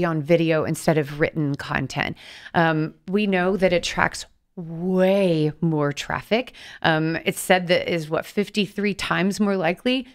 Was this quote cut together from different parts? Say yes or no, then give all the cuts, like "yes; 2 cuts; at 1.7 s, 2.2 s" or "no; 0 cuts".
no; 0 cuts